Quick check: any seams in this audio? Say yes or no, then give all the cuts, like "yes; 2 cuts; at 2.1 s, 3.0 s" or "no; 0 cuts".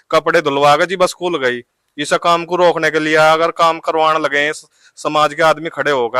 no; 0 cuts